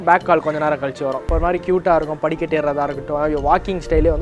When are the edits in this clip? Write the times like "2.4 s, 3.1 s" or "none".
1.3 s